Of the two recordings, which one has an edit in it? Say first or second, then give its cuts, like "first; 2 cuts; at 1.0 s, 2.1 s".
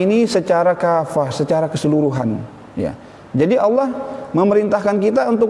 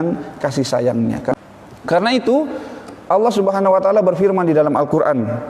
second; 1 cut; at 1.4 s